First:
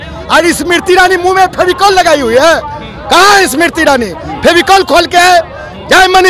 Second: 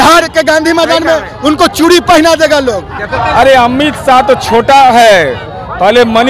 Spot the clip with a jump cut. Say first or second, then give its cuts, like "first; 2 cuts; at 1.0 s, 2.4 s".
second; 1 cut; at 3.1 s